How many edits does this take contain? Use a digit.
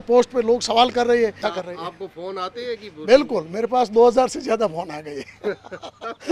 1